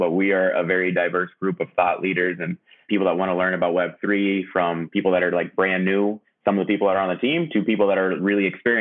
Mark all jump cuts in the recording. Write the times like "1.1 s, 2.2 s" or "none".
6.2 s